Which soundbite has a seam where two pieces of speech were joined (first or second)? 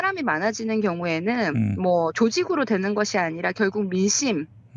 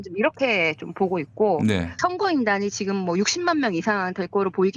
second